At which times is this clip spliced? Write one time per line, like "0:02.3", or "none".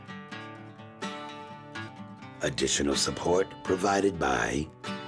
0:01.4